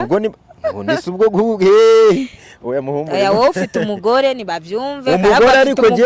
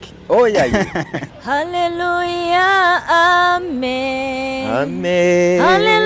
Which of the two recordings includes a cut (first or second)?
second